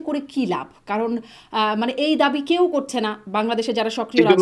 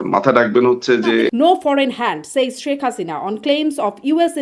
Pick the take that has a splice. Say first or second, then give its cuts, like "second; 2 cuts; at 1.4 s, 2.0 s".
second; 1 cut; at 1.3 s